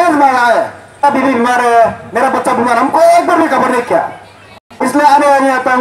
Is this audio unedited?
no; 2 cuts; at 1.0 s, 4.6 s

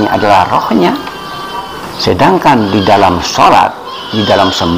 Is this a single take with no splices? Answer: yes; 0 cuts

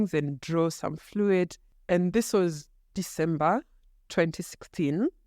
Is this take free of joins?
no; 1 cut; at 1.6 s

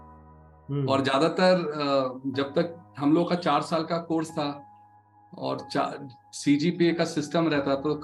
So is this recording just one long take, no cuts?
yes; 0 cuts

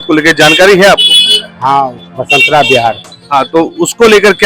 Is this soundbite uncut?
no; 2 cuts; at 2.1 s, 3.1 s

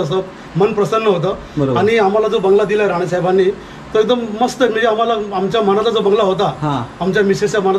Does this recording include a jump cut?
no; 0 cuts

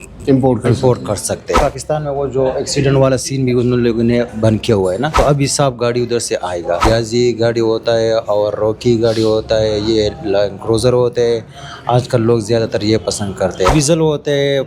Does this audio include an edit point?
yes; 4 cuts; at 1.6 s, 5.1 s, 6.8 s, 13.7 s

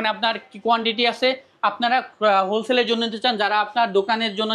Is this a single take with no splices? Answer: yes; 0 cuts

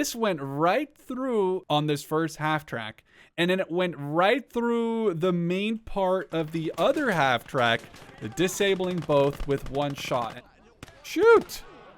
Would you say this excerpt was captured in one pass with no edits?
no; 2 cuts; at 1.6 s, 10.4 s

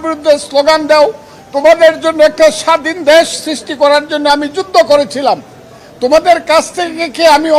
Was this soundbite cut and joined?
no; 0 cuts

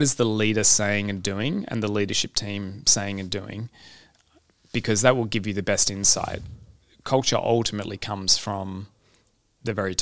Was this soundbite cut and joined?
no; 0 cuts

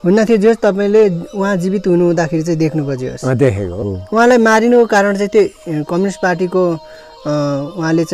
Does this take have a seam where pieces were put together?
yes; 1 cut; at 3.8 s

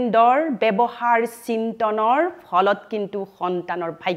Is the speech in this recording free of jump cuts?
yes; 0 cuts

